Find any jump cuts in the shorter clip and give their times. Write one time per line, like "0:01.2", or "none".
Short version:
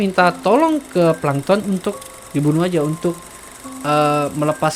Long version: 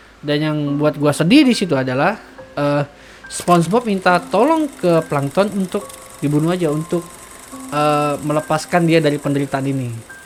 none